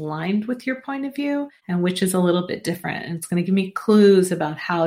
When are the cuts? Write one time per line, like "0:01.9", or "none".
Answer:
0:01.6